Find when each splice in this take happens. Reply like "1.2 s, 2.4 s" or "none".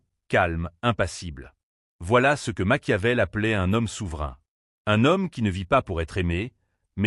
2.4 s, 5.1 s